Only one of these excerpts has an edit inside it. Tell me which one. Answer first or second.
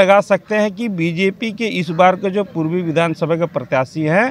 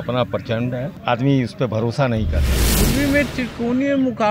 second